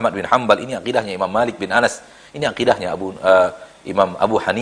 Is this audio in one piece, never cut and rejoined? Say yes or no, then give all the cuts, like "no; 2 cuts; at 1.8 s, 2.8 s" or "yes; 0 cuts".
yes; 0 cuts